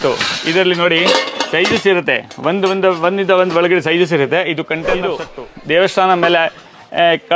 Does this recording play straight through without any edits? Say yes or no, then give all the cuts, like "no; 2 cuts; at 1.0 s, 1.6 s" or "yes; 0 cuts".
no; 1 cut; at 5.2 s